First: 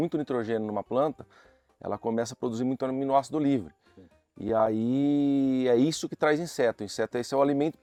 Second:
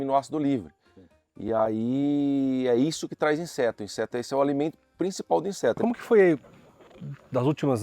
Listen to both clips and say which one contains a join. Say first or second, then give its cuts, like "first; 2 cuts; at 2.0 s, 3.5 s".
second; 1 cut; at 5.8 s